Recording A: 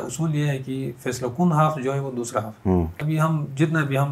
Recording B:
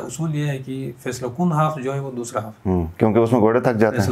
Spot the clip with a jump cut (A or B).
A